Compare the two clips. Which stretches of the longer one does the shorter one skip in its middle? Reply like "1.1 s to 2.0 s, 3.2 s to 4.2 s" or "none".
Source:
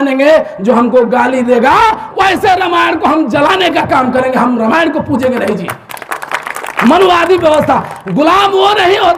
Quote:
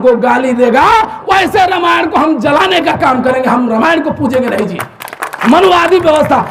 6.1 s to 6.6 s